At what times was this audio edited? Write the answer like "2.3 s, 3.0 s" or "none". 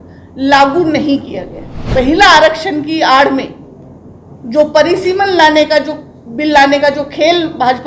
1.8 s

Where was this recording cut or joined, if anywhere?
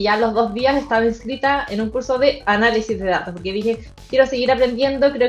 none

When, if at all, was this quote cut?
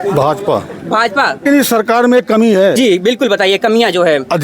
1.4 s, 2.8 s

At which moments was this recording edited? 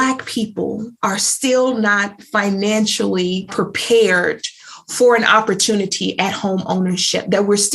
3.5 s

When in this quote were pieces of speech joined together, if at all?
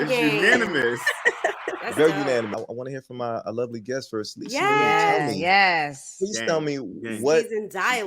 2.5 s

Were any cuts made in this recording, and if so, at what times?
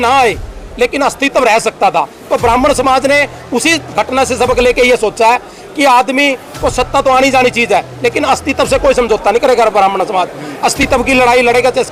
none

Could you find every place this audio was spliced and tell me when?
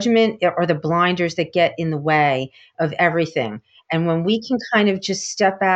none

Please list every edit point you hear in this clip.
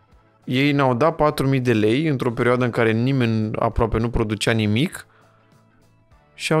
none

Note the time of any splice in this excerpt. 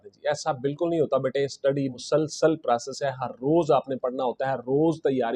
2.0 s

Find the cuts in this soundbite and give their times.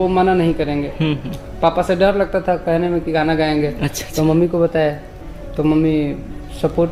none

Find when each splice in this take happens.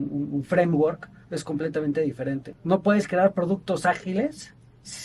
2.5 s

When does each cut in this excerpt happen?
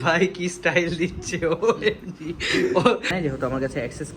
3.1 s

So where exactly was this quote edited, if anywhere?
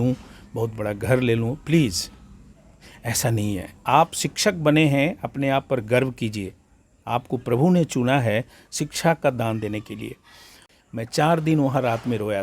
10.6 s

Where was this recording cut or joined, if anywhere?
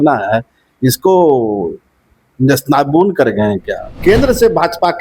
4.0 s

